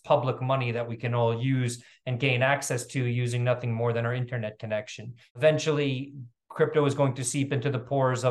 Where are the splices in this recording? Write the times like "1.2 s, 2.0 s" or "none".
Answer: 5.2 s